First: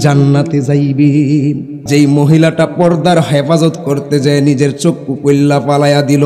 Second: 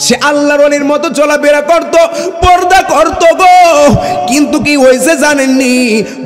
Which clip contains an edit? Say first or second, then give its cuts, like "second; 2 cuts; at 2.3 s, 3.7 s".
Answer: first; 1 cut; at 1.7 s